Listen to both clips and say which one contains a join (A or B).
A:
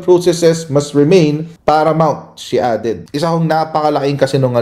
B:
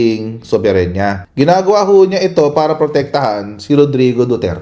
A